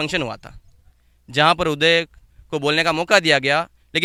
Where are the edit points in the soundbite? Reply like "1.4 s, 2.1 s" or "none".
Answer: none